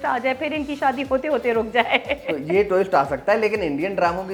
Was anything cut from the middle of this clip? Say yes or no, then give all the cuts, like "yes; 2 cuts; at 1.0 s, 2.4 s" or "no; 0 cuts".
no; 0 cuts